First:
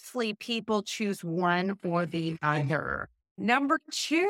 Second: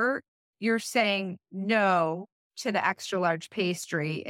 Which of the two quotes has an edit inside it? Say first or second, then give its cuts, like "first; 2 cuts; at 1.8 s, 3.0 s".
first; 1 cut; at 3.3 s